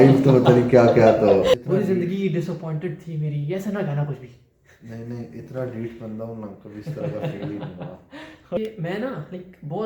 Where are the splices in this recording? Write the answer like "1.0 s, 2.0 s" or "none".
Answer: 1.5 s, 8.6 s